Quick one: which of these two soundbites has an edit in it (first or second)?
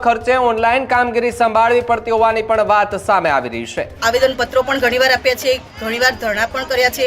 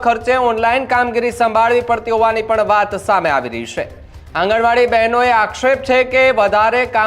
first